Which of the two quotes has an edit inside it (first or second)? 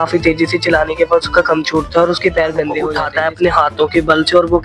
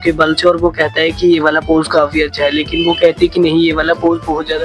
first